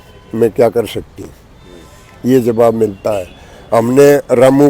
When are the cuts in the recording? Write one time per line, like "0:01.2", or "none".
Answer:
none